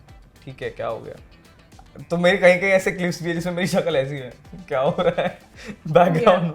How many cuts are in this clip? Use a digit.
0